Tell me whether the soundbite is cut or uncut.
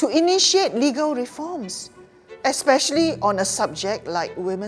uncut